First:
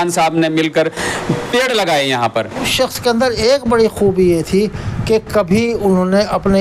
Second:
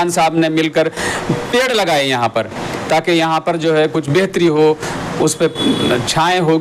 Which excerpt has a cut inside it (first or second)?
first